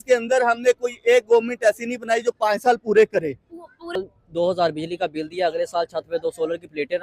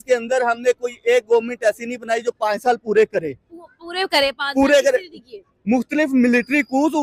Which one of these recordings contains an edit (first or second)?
first